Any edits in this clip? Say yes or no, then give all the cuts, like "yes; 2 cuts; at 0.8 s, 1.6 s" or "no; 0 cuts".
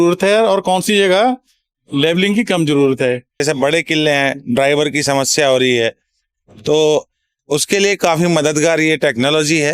yes; 1 cut; at 3.4 s